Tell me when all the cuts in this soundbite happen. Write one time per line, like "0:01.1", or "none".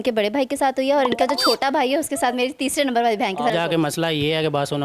0:03.5

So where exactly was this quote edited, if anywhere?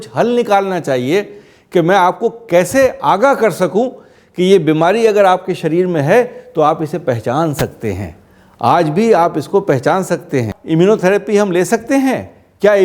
0:10.6

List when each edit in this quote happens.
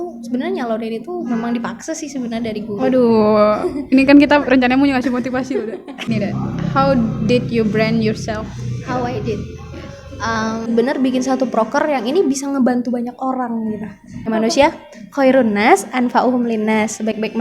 0:06.1
0:10.7
0:14.2

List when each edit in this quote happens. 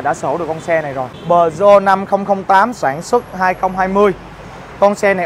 0:01.2

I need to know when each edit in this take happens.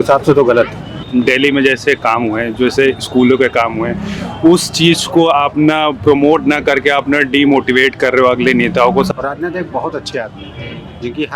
0:01.0
0:09.1

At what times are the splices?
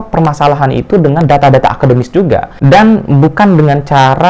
0:02.5

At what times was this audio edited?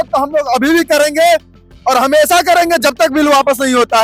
none

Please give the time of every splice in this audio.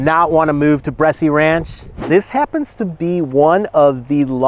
0:01.9

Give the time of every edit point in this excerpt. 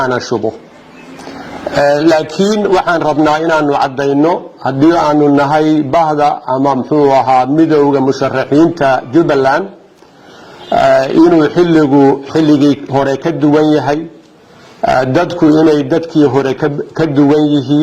none

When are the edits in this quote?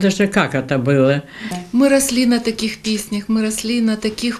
0:01.4

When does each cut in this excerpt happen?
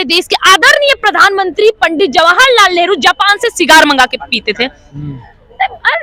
none

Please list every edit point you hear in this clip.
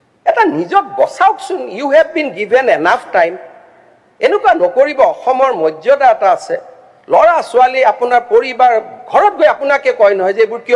none

